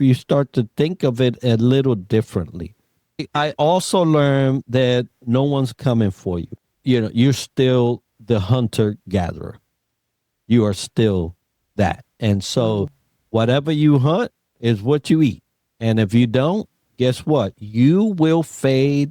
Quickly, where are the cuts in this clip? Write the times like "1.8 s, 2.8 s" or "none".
3.2 s, 6.5 s